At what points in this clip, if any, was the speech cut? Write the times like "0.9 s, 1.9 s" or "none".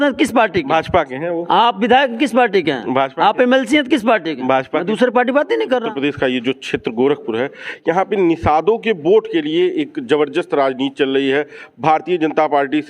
5.9 s

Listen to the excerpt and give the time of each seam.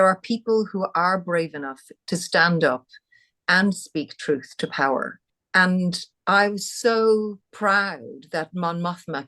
5.5 s, 7.5 s

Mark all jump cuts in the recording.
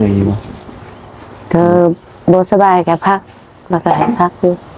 none

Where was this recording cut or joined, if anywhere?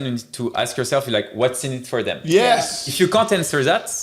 2.8 s

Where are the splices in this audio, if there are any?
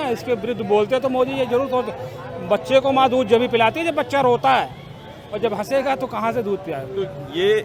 none

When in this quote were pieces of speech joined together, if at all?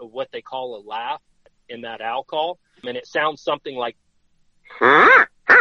1.5 s, 2.8 s, 3.9 s

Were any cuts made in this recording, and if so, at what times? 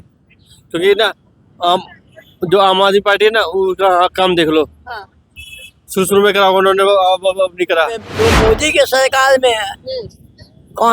8.1 s

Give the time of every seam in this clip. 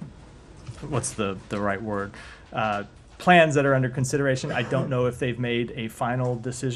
3.9 s

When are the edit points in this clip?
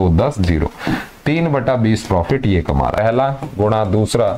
3.0 s

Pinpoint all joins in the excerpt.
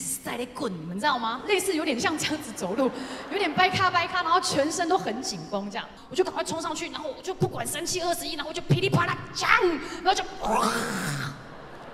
6.0 s

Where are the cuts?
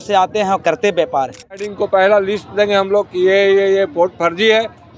1.7 s

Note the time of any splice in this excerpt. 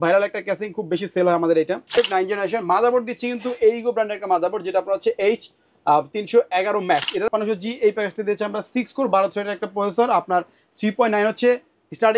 1.9 s, 7.3 s

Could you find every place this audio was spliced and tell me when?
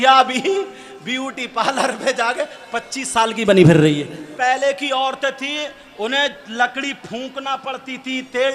4.3 s

